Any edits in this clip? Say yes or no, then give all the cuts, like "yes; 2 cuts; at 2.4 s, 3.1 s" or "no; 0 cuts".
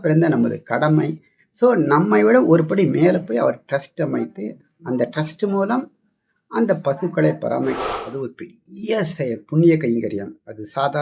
yes; 1 cut; at 7.9 s